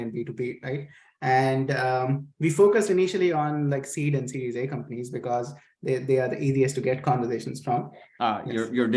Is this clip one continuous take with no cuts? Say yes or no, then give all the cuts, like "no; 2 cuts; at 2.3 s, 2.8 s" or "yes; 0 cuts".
no; 1 cut; at 8.1 s